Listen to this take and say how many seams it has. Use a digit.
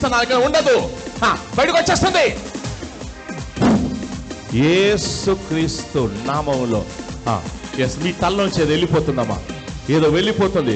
0